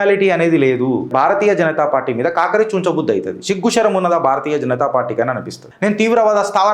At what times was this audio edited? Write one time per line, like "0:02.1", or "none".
0:01.1
0:05.7